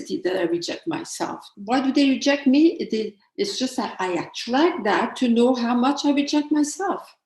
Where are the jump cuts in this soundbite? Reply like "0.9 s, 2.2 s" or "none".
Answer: 1.5 s